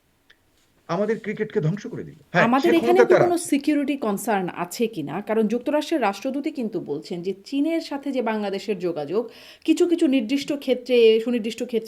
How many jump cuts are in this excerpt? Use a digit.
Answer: 1